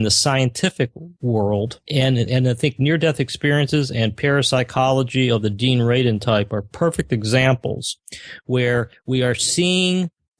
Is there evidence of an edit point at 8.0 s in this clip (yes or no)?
no